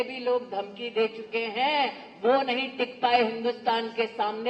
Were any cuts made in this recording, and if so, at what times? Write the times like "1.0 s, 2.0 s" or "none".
none